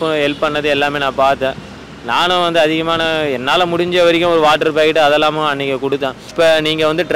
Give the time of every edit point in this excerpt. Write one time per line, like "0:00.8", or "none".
0:06.2